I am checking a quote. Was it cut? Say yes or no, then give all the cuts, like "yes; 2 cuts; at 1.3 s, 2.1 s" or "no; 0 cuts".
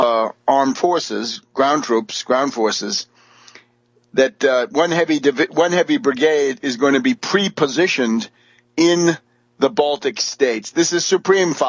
yes; 1 cut; at 7.6 s